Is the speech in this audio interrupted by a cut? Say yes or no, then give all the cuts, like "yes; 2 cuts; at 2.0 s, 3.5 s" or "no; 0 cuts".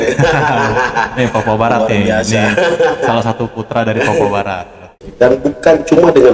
yes; 1 cut; at 5.0 s